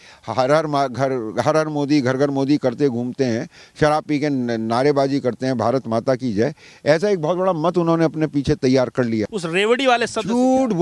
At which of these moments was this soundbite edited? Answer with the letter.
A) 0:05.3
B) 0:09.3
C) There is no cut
B